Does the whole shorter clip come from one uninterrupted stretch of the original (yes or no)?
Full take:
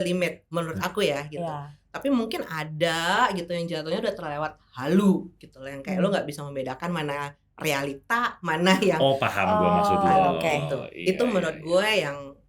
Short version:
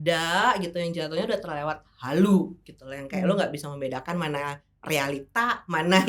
yes